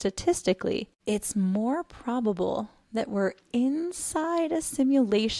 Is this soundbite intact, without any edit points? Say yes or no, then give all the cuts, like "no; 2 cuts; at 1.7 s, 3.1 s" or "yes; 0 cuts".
no; 1 cut; at 0.9 s